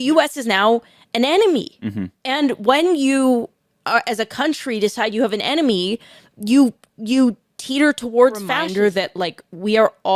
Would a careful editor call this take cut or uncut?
cut